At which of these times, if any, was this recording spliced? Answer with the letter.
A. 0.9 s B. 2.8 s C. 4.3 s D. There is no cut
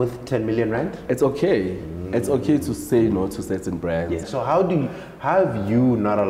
C